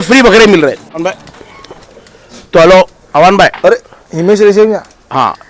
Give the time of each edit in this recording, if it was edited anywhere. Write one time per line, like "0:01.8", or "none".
0:01.0